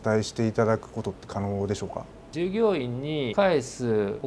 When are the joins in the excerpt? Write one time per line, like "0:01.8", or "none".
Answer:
0:02.2